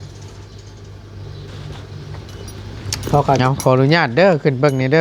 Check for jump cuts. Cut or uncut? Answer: cut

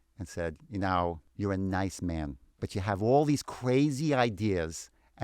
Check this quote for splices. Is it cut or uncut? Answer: cut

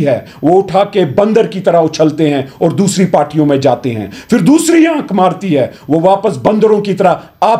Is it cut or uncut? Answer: uncut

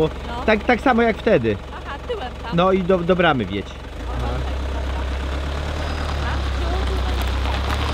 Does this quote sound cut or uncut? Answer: uncut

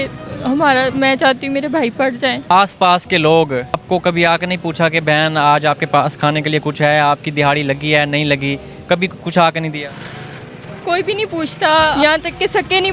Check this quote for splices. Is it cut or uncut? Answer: cut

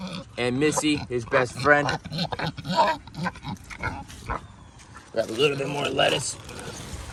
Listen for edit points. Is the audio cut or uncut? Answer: uncut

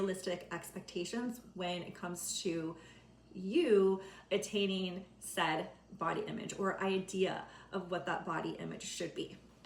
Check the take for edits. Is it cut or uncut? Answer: uncut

